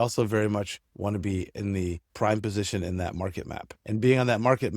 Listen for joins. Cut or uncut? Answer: cut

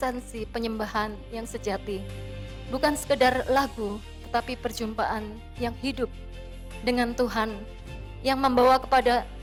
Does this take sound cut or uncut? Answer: uncut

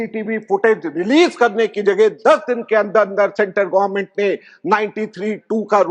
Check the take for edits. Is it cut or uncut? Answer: uncut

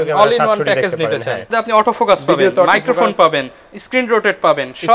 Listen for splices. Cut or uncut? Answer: cut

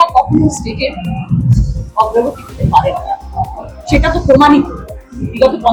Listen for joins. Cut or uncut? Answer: uncut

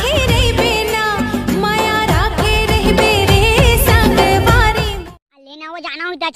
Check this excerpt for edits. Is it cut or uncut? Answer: cut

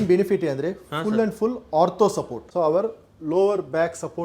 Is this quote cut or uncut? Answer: cut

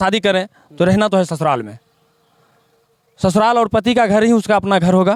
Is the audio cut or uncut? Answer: uncut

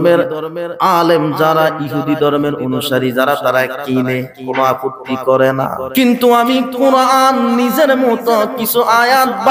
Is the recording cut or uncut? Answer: cut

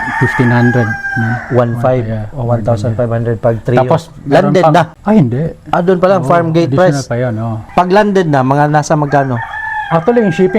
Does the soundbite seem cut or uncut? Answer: cut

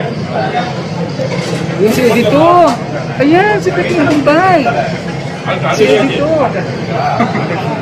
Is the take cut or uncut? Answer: uncut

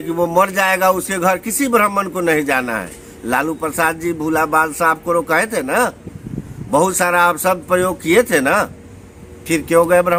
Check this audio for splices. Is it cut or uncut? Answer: uncut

